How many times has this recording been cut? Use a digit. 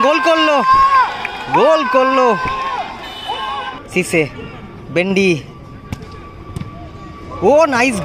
1